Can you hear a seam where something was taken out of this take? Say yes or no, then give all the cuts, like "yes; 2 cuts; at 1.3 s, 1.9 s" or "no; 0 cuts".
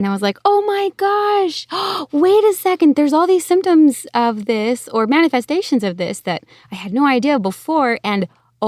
no; 0 cuts